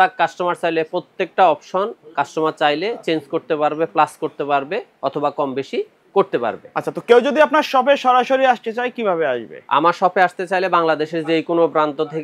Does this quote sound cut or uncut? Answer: uncut